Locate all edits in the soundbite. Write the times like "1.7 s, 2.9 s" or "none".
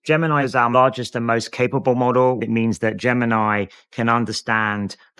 none